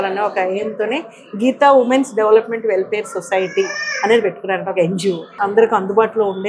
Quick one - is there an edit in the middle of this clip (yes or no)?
yes